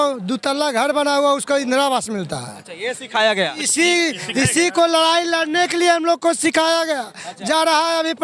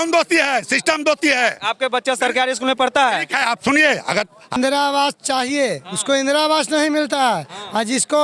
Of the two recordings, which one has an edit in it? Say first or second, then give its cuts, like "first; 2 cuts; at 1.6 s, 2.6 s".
second; 1 cut; at 4.6 s